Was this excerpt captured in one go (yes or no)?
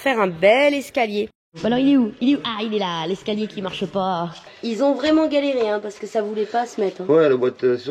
no